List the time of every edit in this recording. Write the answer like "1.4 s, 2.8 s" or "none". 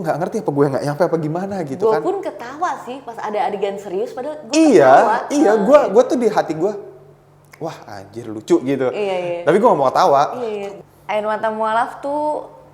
10.7 s